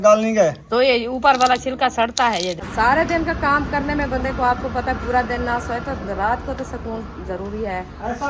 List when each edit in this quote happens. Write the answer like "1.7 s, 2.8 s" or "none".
2.6 s